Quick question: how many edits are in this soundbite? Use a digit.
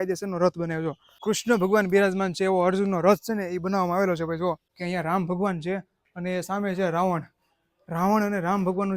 2